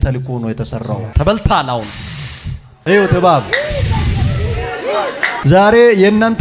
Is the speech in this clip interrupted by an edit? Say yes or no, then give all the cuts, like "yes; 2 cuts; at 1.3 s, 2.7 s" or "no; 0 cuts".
yes; 1 cut; at 5.3 s